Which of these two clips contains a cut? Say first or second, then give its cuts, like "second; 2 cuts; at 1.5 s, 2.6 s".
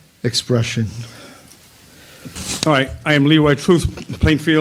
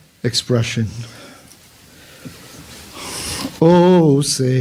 first; 1 cut; at 2.4 s